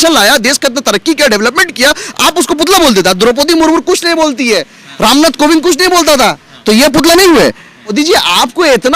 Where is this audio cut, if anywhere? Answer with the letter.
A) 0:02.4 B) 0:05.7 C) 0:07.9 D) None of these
C